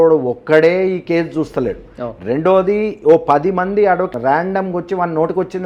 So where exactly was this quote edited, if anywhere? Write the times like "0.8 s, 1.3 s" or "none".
4.1 s